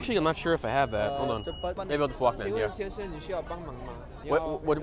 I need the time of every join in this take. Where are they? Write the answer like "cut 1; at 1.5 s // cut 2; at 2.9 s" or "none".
cut 1; at 1.8 s